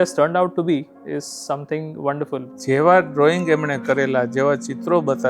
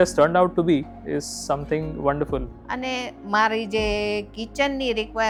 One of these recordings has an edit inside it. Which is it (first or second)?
first